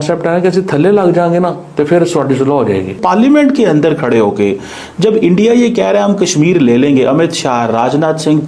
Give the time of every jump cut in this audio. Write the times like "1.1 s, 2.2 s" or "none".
3.0 s